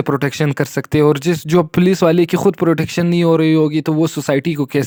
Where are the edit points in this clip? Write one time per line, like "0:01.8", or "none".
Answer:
none